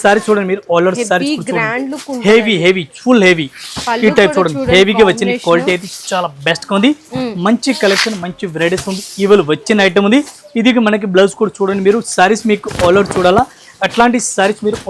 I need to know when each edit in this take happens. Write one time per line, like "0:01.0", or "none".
none